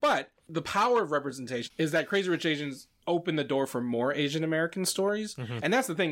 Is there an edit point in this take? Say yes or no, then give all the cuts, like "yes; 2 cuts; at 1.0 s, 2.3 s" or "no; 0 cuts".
no; 0 cuts